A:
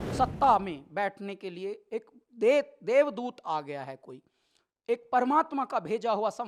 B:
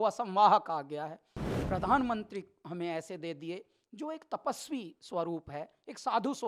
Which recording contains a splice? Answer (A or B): B